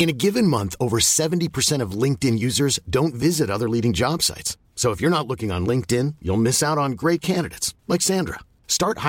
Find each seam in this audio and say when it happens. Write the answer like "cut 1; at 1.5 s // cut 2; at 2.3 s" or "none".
none